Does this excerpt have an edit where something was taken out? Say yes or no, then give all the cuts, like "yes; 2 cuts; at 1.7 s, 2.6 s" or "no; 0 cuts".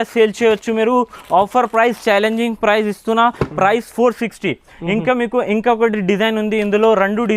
no; 0 cuts